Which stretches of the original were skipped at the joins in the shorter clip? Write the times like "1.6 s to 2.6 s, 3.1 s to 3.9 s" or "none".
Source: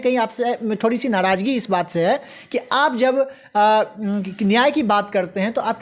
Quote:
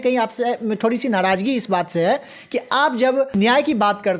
3.3 s to 4.4 s

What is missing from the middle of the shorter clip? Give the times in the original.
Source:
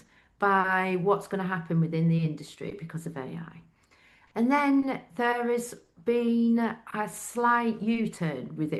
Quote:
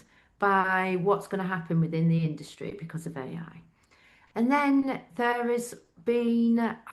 none

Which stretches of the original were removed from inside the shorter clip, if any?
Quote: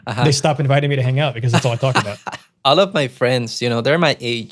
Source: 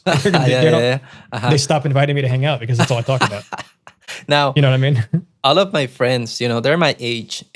3.8 s to 5.3 s

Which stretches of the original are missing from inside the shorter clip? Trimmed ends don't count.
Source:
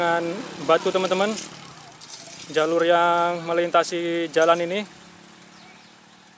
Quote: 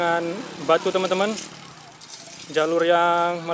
none

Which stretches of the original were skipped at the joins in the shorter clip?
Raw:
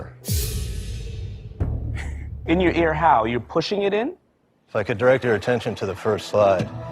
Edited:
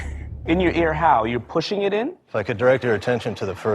4.2 s to 4.6 s

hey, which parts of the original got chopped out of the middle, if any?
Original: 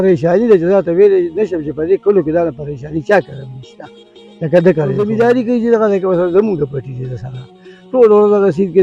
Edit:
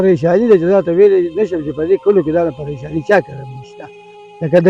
none

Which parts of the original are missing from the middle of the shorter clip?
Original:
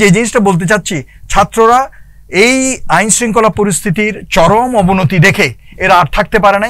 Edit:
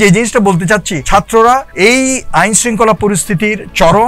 1.0 s to 1.2 s, 1.9 s to 2.2 s

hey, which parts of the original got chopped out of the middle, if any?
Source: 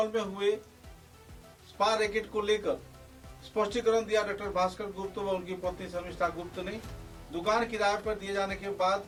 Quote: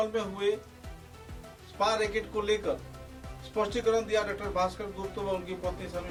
none

